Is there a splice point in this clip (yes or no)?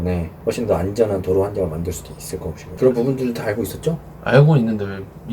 yes